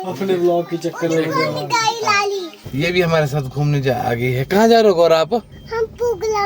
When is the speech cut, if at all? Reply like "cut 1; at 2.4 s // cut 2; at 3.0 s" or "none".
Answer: cut 1; at 2.6 s // cut 2; at 5.6 s